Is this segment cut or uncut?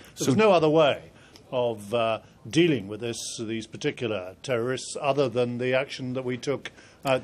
cut